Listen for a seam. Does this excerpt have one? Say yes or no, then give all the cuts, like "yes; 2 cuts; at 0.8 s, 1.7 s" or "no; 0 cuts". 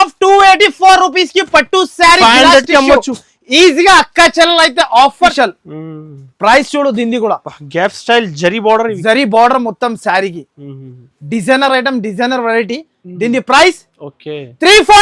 yes; 1 cut; at 5.3 s